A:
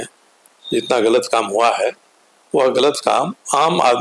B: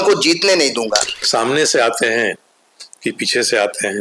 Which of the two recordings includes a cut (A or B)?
B